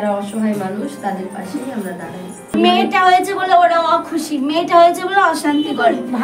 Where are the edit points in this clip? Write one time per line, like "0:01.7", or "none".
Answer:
0:02.5